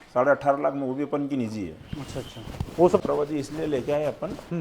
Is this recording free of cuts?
no; 1 cut; at 3.0 s

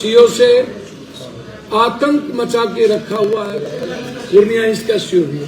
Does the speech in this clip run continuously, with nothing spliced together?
no; 1 cut; at 3.3 s

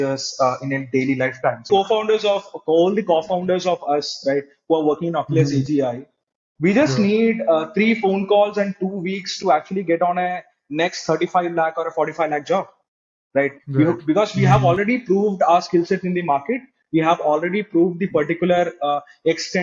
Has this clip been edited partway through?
yes; 1 cut; at 1.7 s

